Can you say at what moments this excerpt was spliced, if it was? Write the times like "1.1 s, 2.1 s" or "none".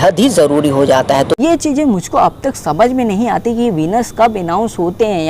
1.3 s